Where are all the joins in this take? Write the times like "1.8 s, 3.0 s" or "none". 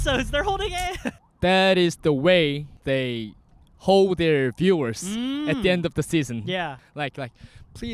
1.2 s, 2.7 s, 6.7 s